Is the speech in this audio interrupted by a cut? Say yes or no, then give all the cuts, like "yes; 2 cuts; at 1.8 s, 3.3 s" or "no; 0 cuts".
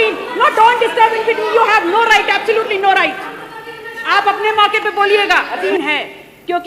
yes; 1 cut; at 5.6 s